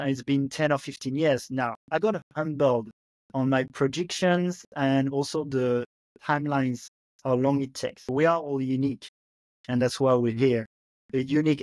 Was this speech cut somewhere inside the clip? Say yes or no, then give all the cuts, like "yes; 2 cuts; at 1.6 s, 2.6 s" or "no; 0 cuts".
yes; 2 cuts; at 1.8 s, 8.0 s